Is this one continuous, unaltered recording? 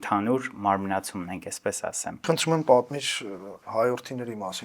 no; 1 cut; at 2.2 s

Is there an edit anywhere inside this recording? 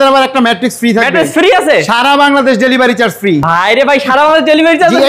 no; 0 cuts

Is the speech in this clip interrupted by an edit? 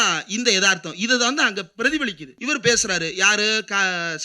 yes; 1 cut; at 2.3 s

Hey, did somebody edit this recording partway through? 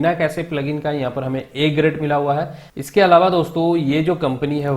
yes; 1 cut; at 2.6 s

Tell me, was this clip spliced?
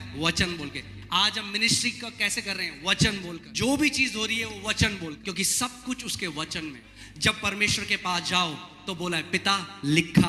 yes; 3 cuts; at 3.4 s, 5.2 s, 6.9 s

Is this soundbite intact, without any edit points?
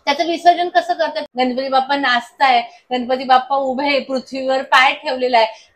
no; 1 cut; at 1.2 s

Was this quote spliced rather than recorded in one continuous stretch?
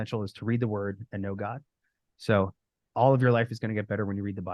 no; 0 cuts

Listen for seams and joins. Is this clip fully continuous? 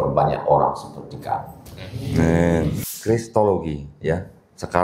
no; 1 cut; at 2.8 s

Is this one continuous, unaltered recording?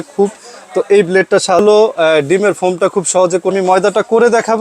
no; 2 cuts; at 1.6 s, 3.5 s

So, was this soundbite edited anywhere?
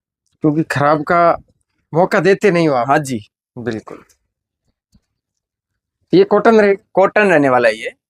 no; 0 cuts

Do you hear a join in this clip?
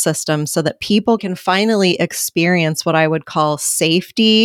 yes; 1 cut; at 1.2 s

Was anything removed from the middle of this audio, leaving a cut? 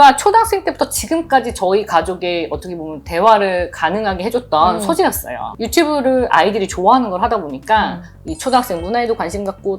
no; 0 cuts

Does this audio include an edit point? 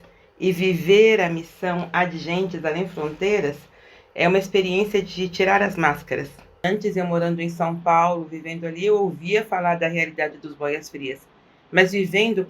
yes; 1 cut; at 6.6 s

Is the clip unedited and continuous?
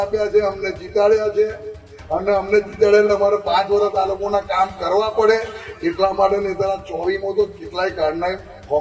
yes; 0 cuts

